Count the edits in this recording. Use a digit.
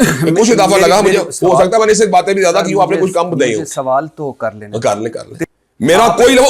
1